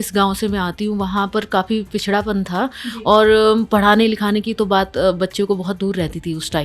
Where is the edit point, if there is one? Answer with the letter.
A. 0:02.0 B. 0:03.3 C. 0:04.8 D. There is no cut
D